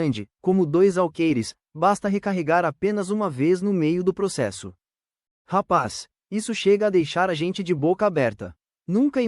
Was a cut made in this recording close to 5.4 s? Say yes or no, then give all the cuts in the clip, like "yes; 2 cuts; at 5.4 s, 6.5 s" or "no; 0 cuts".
yes; 1 cut; at 5.4 s